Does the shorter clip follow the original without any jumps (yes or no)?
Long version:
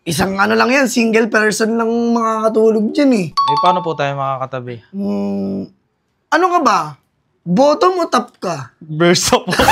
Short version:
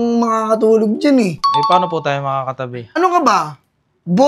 no